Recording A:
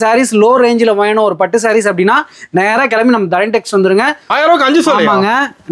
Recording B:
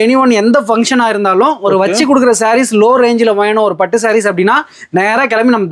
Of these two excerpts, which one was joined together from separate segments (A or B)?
A